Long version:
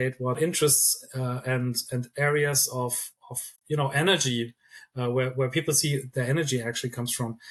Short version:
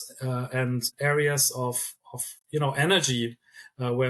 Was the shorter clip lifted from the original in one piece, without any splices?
no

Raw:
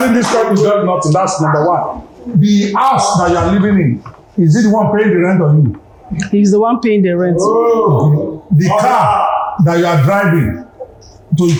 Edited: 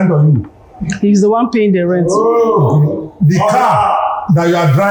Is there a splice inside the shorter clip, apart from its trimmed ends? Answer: no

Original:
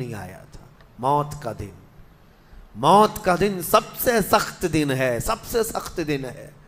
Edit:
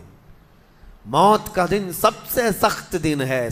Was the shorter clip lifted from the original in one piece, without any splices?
yes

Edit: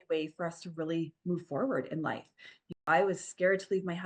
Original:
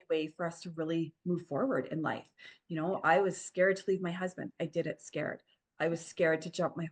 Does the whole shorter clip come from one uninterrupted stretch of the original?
no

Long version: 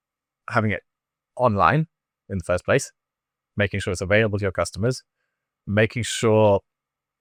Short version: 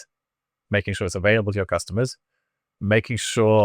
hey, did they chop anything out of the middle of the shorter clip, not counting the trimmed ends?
no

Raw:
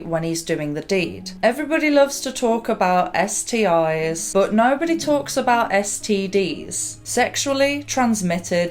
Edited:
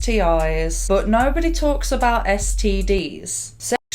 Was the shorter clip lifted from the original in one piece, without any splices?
yes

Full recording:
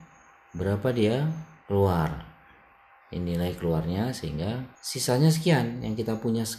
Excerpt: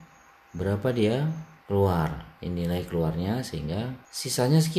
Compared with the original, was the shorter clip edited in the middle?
yes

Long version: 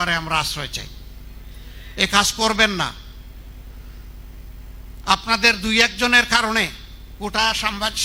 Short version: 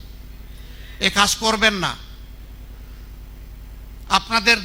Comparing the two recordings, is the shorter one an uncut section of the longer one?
yes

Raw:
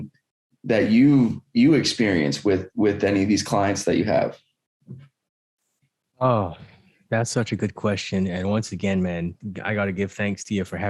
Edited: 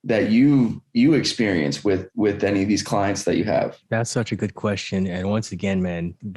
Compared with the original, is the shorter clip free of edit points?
no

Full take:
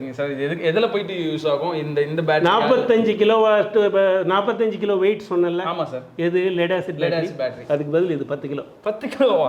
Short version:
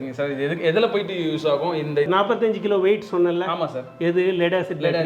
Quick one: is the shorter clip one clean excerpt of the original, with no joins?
no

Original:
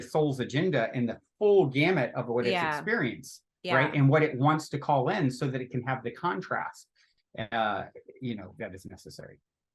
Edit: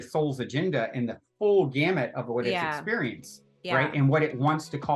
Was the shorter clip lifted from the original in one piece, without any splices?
yes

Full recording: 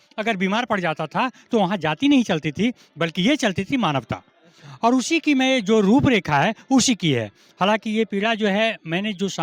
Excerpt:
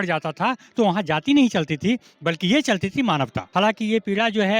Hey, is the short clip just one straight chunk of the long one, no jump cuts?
no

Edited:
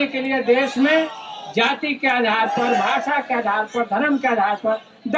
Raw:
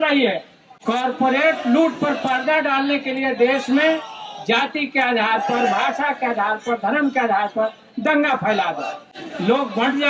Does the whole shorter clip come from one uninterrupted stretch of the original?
yes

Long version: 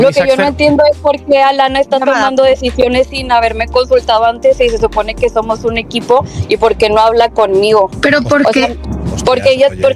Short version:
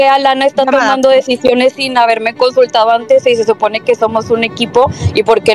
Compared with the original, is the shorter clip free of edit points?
yes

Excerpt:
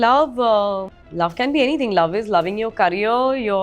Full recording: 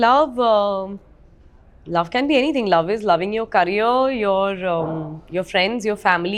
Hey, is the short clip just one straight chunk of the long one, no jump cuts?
no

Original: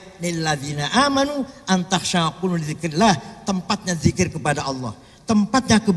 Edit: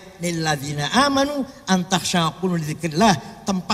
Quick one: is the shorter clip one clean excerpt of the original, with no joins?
yes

